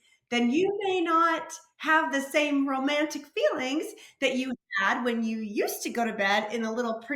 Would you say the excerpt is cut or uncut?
uncut